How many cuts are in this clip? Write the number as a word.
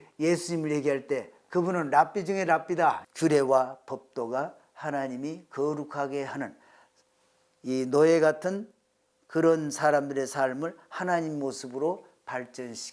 one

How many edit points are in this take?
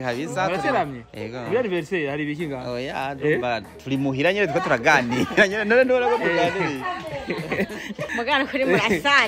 one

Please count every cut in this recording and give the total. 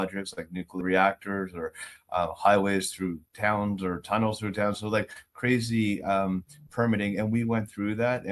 zero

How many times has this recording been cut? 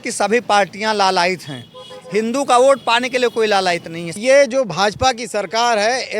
one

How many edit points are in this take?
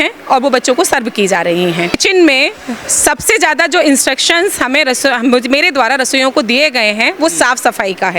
one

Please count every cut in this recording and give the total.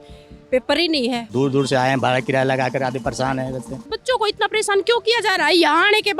two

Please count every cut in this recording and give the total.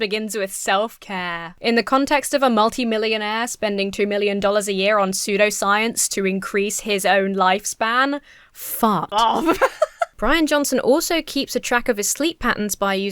two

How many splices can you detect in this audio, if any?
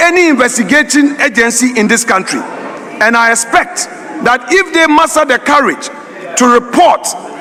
zero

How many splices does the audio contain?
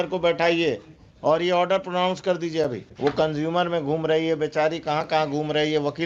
one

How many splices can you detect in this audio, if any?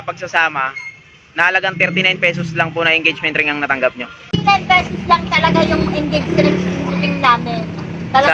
one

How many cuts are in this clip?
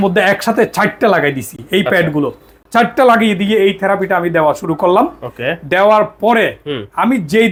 zero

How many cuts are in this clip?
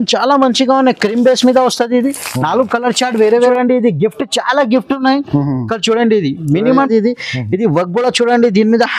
two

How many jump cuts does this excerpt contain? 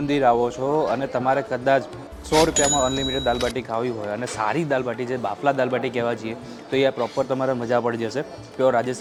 zero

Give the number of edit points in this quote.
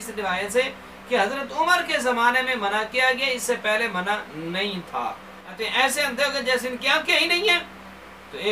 one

